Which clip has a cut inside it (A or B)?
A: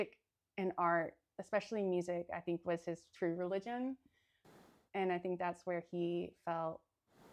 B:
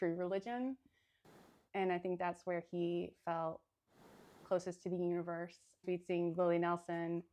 B